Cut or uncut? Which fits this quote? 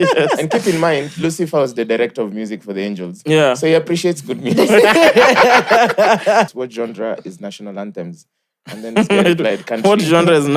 cut